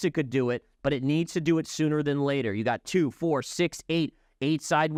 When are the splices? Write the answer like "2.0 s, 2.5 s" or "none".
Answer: none